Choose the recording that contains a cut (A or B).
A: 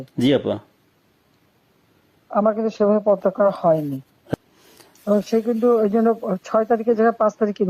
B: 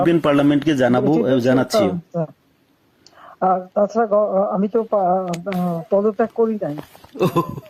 A